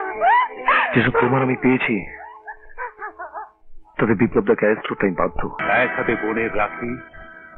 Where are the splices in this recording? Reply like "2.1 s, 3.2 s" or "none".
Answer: 5.5 s